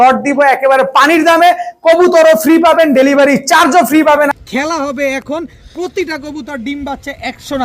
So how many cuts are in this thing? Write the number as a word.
one